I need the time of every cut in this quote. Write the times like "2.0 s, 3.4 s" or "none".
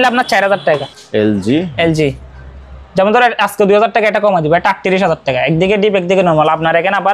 1.0 s